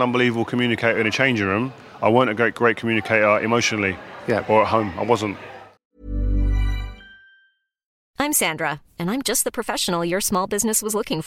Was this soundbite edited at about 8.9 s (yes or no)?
no